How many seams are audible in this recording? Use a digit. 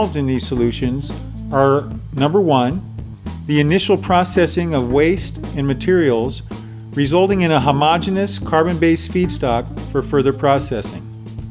1